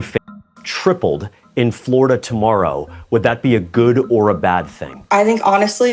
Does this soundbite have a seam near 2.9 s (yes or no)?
no